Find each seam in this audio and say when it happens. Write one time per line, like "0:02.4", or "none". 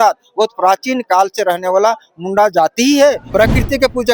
0:03.2